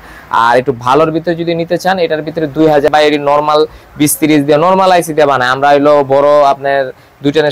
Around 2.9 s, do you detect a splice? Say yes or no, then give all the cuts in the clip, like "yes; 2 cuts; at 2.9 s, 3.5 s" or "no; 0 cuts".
yes; 1 cut; at 2.9 s